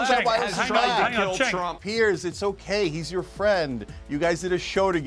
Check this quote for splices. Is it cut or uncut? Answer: cut